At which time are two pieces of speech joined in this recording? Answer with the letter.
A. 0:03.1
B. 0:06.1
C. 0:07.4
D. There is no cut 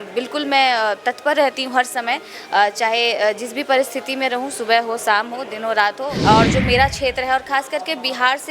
B